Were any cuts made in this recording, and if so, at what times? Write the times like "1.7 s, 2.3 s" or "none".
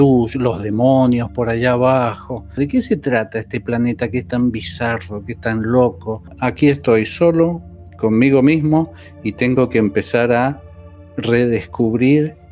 2.6 s, 6.4 s